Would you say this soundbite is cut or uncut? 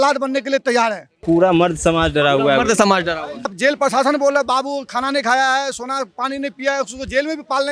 cut